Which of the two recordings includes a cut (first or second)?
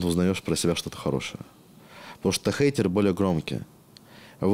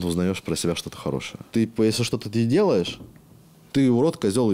second